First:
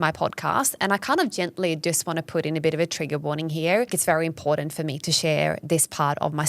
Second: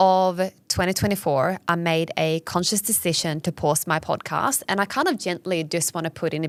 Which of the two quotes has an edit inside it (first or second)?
first